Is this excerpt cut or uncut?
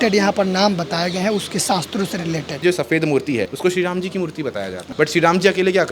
cut